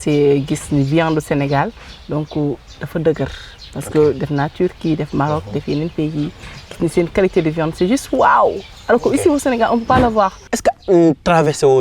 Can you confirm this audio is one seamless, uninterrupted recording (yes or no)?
no